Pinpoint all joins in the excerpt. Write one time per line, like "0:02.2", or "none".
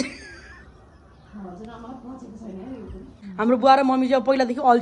0:03.2